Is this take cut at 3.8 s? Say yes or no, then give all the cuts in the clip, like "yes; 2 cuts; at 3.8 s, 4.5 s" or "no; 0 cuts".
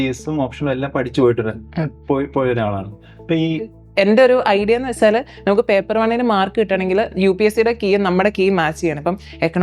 yes; 1 cut; at 3.8 s